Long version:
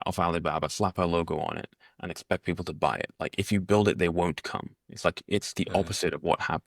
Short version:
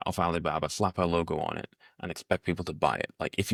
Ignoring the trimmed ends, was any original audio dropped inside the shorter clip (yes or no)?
no